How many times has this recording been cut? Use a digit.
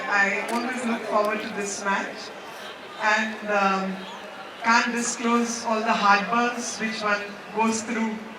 0